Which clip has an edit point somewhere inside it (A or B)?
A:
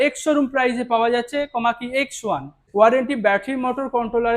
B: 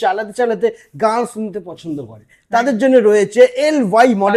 A